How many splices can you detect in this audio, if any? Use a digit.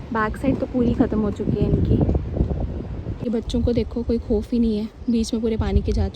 1